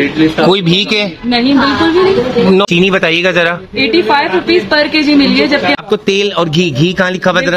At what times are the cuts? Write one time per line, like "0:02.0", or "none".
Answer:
0:05.7